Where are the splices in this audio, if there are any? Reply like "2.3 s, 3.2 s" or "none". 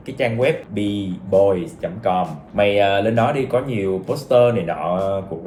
none